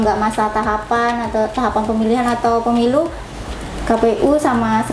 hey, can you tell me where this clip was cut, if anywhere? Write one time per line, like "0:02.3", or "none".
none